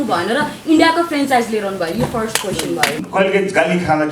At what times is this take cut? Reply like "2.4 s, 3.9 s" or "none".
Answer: 3.0 s